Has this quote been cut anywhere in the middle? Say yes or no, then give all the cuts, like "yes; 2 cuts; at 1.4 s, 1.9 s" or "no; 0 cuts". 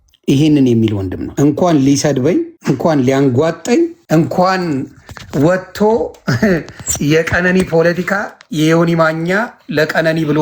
yes; 3 cuts; at 1.2 s, 2.5 s, 4.0 s